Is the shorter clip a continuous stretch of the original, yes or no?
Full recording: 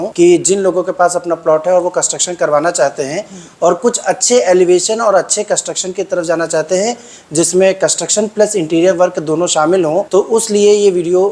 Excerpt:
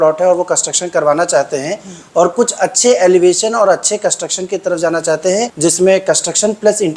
no